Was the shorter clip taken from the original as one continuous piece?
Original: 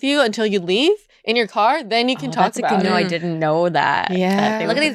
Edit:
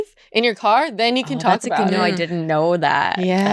yes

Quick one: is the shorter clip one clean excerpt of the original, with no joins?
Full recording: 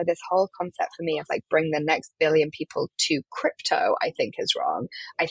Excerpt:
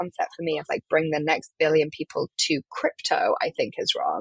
yes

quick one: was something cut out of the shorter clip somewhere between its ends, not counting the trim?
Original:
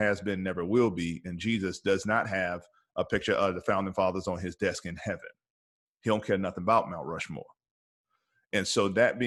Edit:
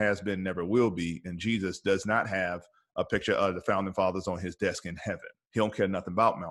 yes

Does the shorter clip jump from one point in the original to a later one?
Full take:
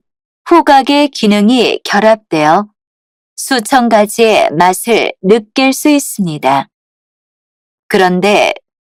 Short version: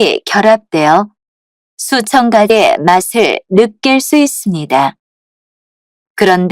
yes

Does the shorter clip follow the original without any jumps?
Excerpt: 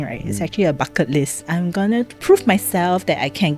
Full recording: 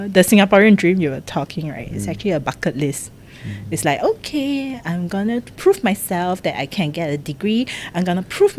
no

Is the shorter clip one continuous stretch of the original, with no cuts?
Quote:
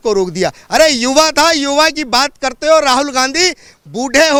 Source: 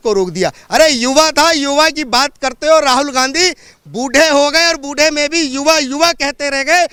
yes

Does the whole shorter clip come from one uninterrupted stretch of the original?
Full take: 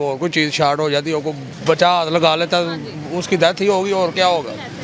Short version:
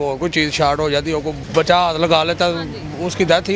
no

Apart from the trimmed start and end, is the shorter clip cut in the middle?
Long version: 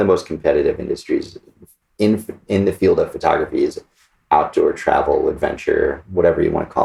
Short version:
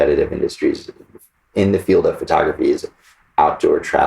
yes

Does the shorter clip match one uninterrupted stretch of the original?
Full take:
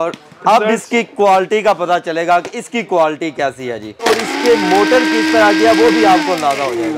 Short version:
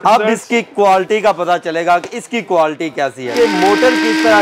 no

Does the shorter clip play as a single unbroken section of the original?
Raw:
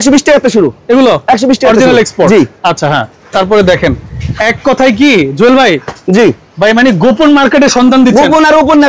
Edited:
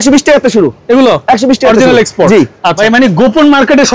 no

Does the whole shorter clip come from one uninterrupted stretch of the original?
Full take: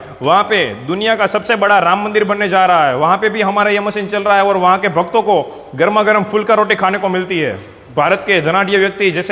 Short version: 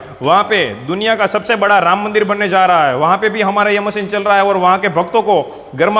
yes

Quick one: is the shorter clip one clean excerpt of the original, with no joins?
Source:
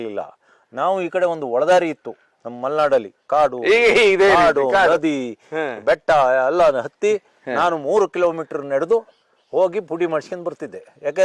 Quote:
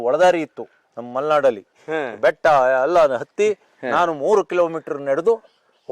no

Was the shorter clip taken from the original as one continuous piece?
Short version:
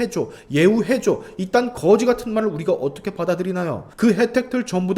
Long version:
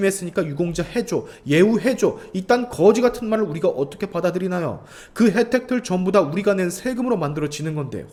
no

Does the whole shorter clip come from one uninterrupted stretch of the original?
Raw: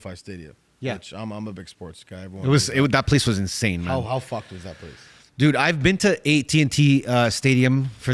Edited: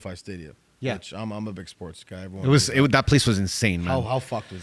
yes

